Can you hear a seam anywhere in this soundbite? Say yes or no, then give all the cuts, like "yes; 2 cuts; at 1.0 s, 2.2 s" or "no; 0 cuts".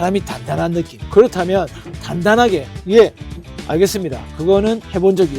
yes; 1 cut; at 1.0 s